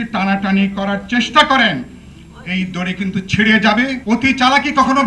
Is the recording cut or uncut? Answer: cut